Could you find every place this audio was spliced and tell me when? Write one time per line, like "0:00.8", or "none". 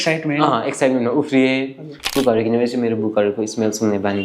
0:02.1